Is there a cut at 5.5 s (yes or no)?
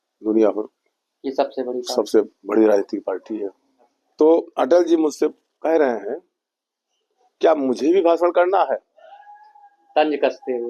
no